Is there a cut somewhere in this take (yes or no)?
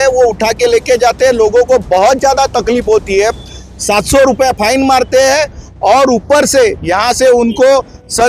no